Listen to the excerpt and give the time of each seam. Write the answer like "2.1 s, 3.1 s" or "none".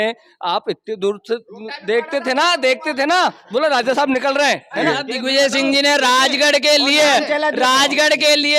4.9 s